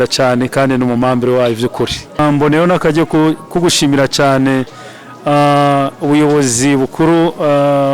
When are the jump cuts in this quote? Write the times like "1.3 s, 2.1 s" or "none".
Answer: 2.2 s

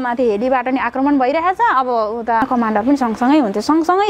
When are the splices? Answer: 2.4 s

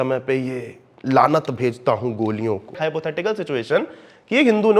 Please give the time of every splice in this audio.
2.8 s

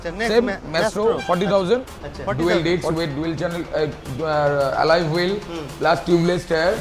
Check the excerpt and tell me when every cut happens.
2.4 s

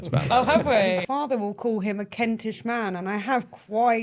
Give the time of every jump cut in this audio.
1.1 s

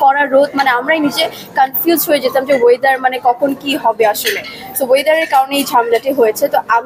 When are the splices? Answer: none

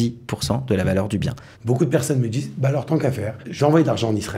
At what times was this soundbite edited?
1.5 s, 3.4 s

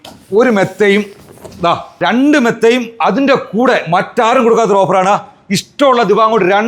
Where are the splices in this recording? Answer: 2.0 s

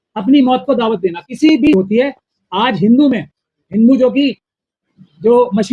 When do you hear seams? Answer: 1.7 s

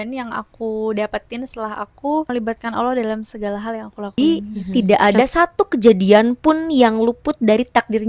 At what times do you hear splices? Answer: 2.3 s, 4.1 s

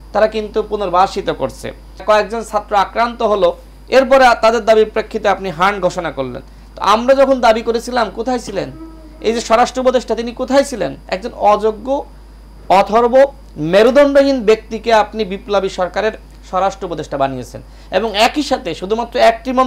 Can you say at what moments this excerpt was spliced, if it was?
2.0 s

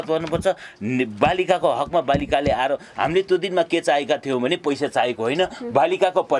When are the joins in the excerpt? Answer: none

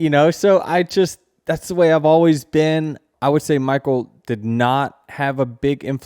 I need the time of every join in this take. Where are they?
3.1 s

